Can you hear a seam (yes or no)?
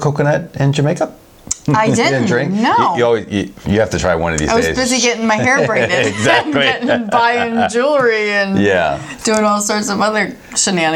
no